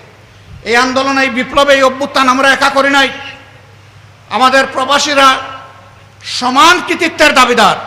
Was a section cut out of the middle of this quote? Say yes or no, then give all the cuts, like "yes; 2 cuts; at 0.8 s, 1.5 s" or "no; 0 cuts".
no; 0 cuts